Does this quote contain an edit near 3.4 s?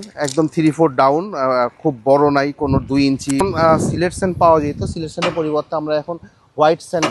yes; 1 cut; at 3.4 s

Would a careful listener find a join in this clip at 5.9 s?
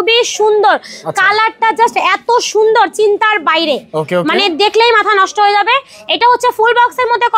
no; 0 cuts

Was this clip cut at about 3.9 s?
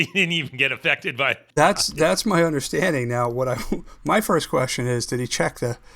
no; 1 cut; at 1.4 s

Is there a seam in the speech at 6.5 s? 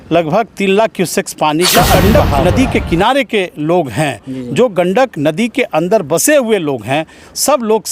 no; 1 cut; at 2.0 s

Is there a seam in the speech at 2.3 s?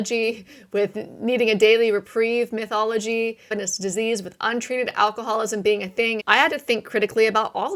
no; 2 cuts; at 3.5 s, 6.2 s

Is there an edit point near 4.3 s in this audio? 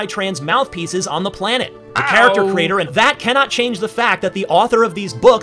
no; 1 cut; at 2.9 s

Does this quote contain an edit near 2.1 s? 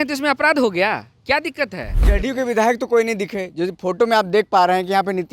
yes; 1 cut; at 2.1 s

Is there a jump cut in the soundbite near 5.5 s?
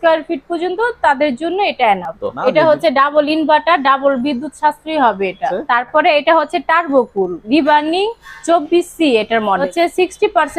yes; 3 cuts; at 2.3 s, 5.5 s, 9.7 s

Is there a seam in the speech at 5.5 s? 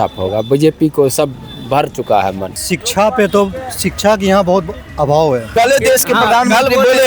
yes; 2 cuts; at 2.6 s, 5.5 s

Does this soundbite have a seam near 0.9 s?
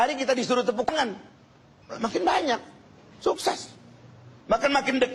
yes; 1 cut; at 0.9 s

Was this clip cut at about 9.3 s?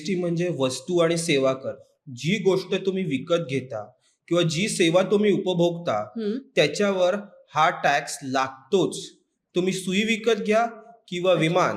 no; 0 cuts

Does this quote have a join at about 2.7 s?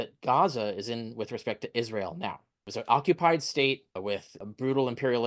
yes; 2 cuts; at 2.7 s, 4.0 s

